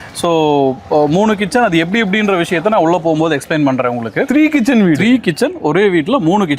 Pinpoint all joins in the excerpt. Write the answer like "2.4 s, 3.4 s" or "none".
none